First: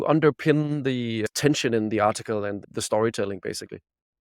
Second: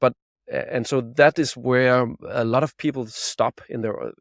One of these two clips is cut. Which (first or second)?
first